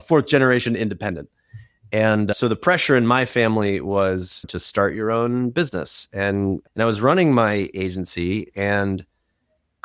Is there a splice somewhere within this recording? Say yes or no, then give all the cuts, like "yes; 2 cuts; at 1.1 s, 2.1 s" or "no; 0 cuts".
yes; 3 cuts; at 2.3 s, 4.4 s, 6.6 s